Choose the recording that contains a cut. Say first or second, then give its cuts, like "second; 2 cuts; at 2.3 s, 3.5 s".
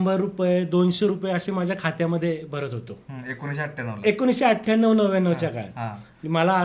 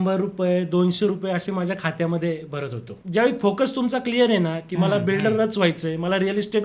second; 1 cut; at 3.0 s